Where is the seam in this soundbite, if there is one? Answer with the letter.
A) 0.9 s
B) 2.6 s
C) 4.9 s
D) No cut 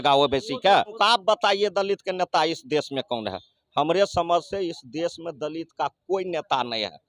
A